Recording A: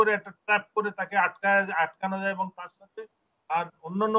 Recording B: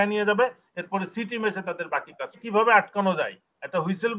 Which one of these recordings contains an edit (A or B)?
B